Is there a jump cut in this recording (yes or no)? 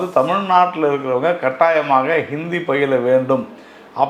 no